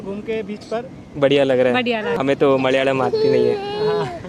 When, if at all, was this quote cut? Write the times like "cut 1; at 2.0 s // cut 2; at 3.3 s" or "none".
cut 1; at 2.2 s